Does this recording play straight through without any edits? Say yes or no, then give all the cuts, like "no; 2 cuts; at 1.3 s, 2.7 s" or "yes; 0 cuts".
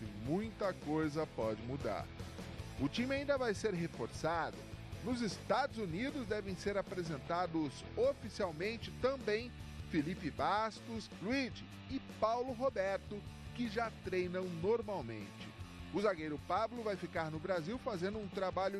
no; 1 cut; at 9.9 s